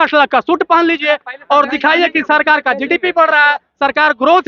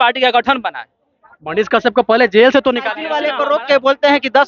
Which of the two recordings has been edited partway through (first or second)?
second